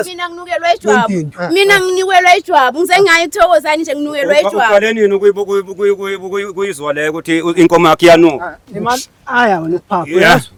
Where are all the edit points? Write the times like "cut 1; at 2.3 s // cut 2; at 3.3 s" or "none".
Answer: none